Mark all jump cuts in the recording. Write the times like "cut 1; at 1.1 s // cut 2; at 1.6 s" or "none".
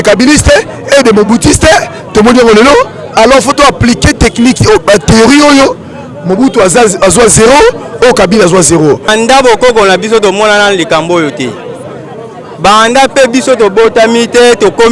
cut 1; at 9.1 s